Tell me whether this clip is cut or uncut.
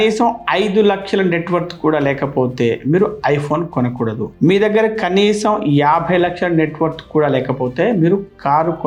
uncut